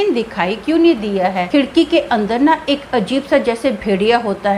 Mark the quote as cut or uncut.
cut